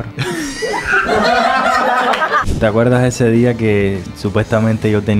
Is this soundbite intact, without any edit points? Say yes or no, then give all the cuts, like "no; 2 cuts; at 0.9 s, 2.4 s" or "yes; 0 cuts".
no; 2 cuts; at 2.4 s, 4.1 s